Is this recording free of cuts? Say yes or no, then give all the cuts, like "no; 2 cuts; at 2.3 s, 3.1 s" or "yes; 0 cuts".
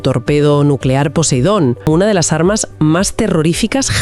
no; 1 cut; at 1.9 s